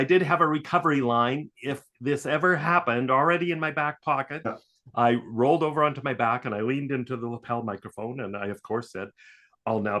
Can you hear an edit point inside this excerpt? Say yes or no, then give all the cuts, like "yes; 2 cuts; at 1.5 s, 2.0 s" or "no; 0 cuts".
no; 0 cuts